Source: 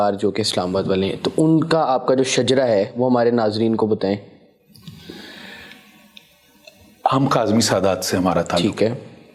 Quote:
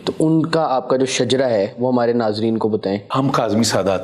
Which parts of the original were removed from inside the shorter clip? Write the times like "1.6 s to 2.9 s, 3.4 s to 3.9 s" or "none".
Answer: 4.3 s to 7.1 s

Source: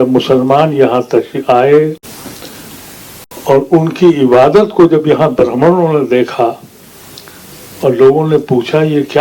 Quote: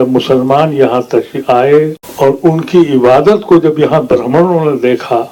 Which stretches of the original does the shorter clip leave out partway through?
2.0 s to 3.3 s

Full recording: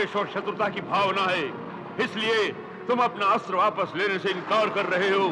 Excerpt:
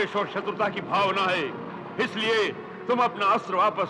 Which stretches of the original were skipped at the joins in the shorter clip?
none

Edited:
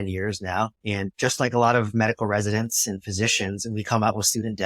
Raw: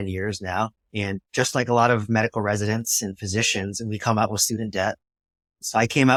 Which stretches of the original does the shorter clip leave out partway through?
1.0 s to 1.1 s

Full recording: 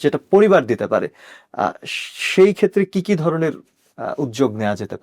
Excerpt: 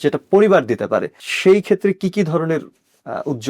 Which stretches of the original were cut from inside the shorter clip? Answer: 1.2 s to 2.1 s

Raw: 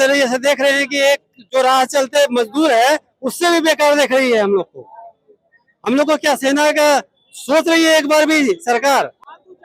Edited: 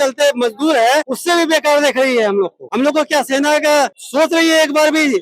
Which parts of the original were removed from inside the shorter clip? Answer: 3.1 s to 3.3 s, 4.8 s to 5.7 s, 7.1 s to 7.4 s

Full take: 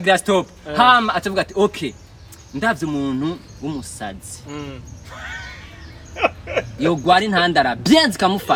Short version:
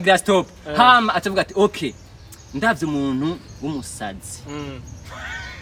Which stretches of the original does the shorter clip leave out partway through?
none

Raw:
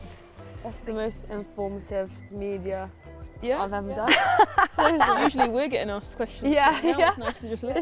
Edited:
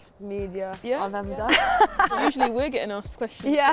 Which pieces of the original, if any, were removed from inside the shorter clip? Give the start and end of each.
2.9 s to 3.4 s, 4.7 s to 5.1 s

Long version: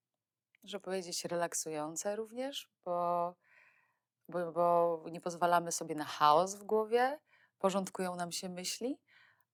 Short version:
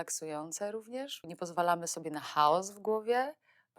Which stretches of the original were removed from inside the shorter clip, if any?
2.7 s to 5.1 s

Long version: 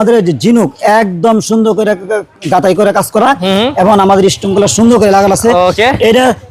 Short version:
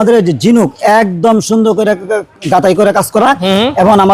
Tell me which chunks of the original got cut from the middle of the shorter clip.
none

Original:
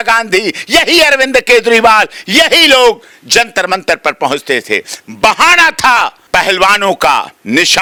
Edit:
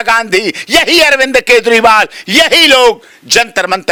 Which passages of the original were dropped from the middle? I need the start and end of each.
none

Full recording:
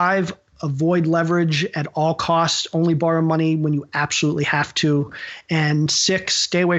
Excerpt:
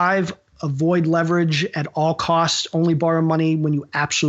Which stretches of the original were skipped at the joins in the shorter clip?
none

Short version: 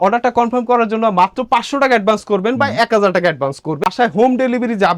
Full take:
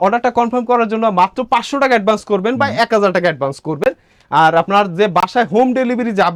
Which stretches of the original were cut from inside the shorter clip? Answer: 3.8 s to 5.2 s

